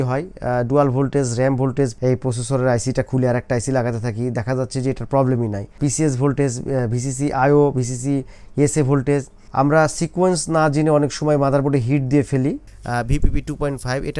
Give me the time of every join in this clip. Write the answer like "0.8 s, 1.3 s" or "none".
1.9 s, 5.7 s, 9.4 s, 12.7 s